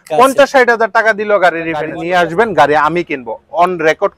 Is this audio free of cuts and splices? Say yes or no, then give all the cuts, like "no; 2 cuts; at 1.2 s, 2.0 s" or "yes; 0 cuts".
no; 1 cut; at 2.0 s